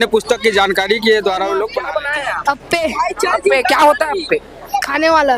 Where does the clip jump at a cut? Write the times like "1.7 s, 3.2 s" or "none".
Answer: 1.8 s